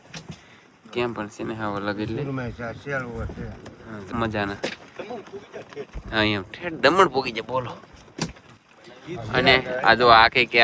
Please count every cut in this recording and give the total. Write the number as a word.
one